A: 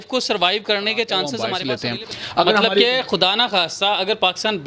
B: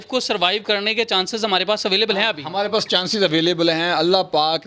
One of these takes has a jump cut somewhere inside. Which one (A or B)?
A